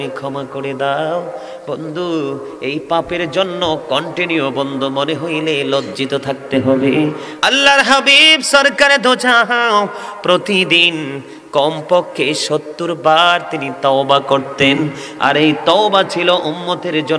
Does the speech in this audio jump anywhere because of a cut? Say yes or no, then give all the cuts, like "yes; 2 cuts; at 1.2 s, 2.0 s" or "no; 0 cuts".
yes; 1 cut; at 7.3 s